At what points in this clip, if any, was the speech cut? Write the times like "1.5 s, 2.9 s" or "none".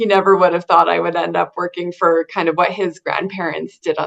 none

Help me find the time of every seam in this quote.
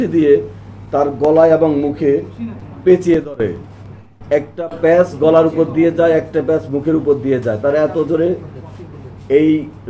none

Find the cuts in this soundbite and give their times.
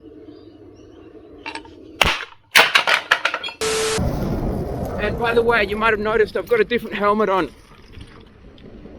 4.0 s

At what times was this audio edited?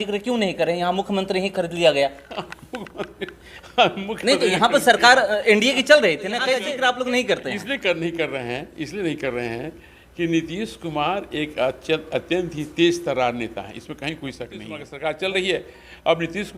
6.6 s, 14.8 s

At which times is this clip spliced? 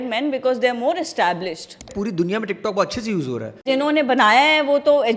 1.8 s, 3.7 s

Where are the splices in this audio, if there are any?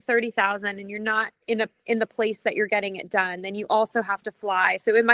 none

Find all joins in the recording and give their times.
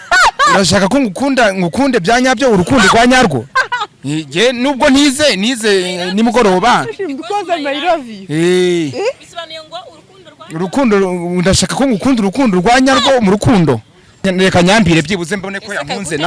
14.2 s

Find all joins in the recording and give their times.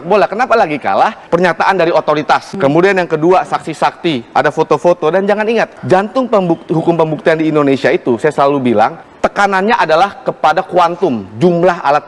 1.2 s, 2.5 s, 5.8 s, 9.0 s

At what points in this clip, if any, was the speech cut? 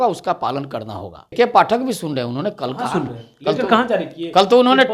1.2 s

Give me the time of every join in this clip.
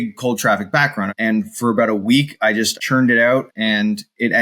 1.1 s, 2.8 s, 3.5 s

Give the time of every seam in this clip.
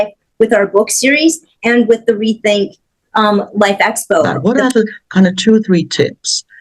4.3 s

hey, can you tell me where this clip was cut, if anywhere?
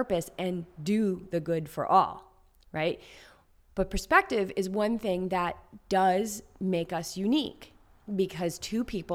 none

